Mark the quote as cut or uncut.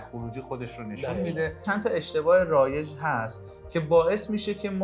cut